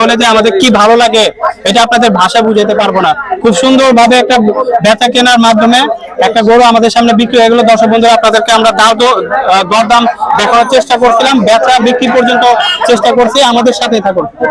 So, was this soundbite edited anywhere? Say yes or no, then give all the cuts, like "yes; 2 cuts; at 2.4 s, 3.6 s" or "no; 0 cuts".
no; 0 cuts